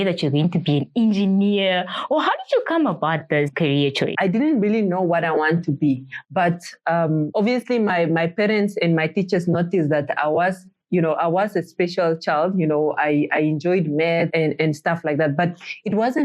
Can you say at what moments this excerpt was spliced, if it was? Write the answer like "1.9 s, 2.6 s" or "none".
4.1 s